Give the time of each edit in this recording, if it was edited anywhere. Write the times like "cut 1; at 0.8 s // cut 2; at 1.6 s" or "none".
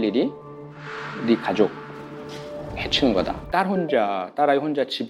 cut 1; at 3.4 s